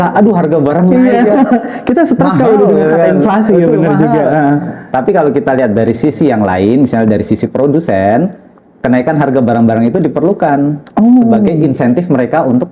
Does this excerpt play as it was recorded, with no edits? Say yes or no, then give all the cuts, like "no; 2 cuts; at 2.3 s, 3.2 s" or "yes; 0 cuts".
yes; 0 cuts